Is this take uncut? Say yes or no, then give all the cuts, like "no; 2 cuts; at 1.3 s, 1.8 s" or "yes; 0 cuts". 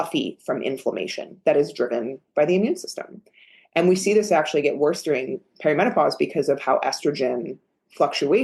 yes; 0 cuts